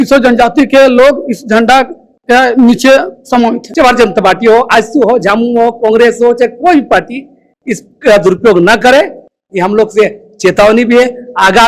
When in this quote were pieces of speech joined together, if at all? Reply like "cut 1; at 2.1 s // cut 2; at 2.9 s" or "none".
cut 1; at 3.6 s